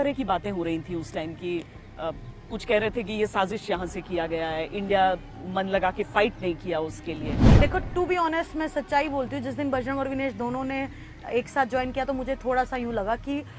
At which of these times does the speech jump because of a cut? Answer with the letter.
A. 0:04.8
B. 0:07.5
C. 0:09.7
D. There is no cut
B